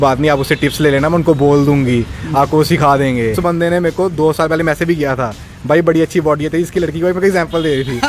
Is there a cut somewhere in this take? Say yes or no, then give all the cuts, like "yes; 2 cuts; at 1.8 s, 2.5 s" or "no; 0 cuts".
yes; 1 cut; at 3.4 s